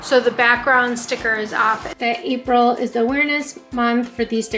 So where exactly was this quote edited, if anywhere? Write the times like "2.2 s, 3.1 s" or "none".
1.9 s, 3.6 s